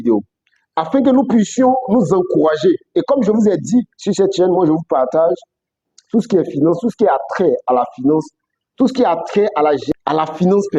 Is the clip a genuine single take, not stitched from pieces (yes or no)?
no